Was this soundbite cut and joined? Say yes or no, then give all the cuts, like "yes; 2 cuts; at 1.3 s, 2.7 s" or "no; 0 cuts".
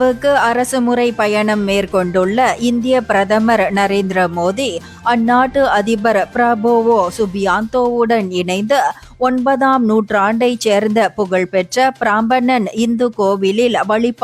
no; 0 cuts